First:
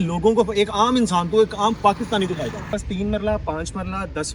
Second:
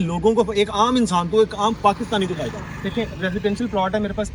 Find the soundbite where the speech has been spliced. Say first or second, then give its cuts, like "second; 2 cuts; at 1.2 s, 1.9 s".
first; 1 cut; at 2.7 s